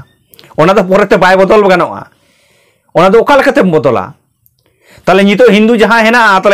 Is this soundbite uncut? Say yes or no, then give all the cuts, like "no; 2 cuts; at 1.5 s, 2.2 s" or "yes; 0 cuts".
yes; 0 cuts